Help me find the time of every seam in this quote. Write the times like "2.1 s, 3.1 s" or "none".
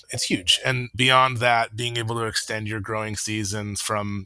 0.9 s